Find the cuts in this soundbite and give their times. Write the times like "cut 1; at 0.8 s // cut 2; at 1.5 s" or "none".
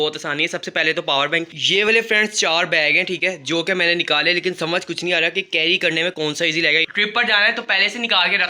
cut 1; at 1.6 s // cut 2; at 6.9 s

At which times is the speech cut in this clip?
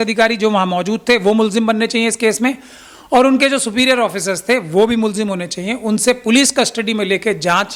none

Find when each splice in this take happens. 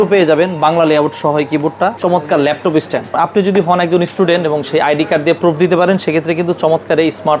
cut 1; at 2.0 s // cut 2; at 3.1 s

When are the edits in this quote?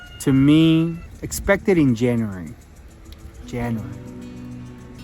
cut 1; at 1.0 s

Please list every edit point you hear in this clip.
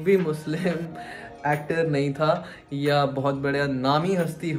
none

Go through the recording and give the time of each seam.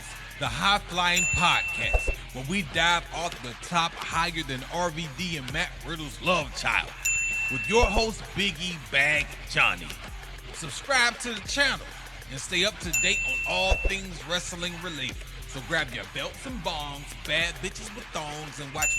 none

